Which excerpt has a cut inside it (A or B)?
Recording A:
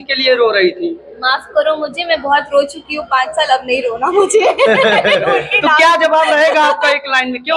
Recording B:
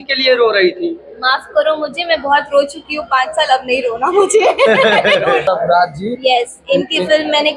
B